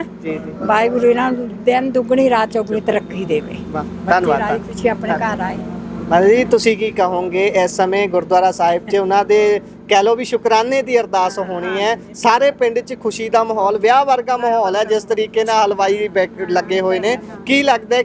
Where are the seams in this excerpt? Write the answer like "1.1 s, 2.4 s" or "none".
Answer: none